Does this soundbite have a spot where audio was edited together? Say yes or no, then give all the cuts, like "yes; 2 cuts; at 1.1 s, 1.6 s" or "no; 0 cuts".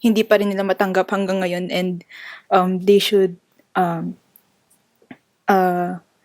no; 0 cuts